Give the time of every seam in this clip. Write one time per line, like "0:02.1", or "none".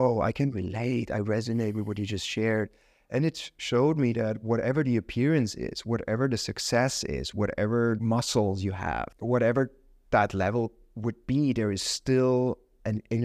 0:08.0
0:09.1